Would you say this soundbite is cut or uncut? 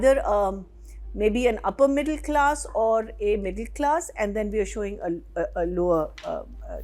uncut